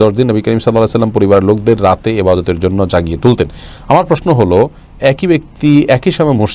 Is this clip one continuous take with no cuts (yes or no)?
yes